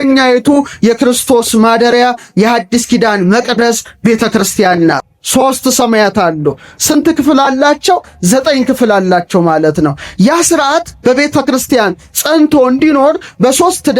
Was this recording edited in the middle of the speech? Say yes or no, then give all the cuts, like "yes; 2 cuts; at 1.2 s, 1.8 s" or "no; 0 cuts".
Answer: yes; 1 cut; at 5.1 s